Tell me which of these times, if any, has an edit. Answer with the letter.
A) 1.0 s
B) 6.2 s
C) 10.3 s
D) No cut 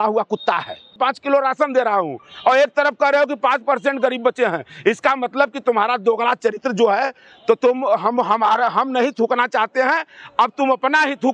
A